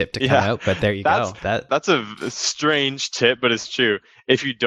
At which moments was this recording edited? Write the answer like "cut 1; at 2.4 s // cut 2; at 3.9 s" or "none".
cut 1; at 1.7 s